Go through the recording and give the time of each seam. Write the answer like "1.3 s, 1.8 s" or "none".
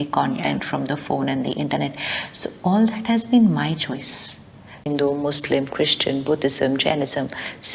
4.9 s